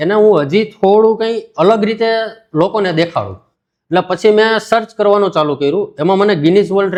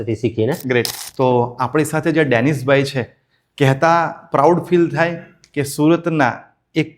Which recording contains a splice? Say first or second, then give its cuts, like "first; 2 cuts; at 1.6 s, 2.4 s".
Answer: second; 1 cut; at 1.0 s